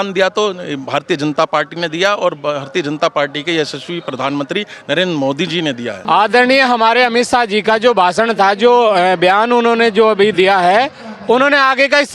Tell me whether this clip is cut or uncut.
cut